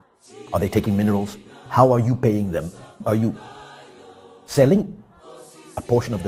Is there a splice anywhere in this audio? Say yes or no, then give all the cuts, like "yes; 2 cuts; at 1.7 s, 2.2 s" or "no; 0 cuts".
no; 0 cuts